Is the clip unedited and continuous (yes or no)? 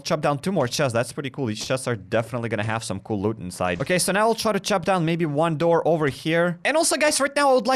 no